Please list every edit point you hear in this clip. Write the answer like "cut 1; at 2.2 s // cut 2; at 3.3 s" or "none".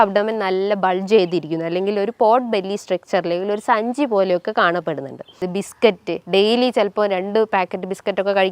cut 1; at 5.5 s